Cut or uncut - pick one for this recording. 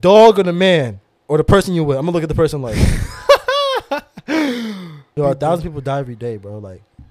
cut